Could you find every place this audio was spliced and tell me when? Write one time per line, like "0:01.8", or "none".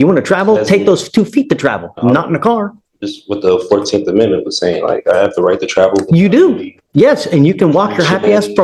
none